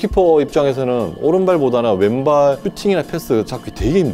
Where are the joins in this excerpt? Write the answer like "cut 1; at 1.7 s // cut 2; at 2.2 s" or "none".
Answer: none